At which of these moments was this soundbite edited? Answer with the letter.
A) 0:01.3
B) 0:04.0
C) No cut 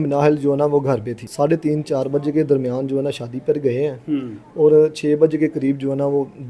A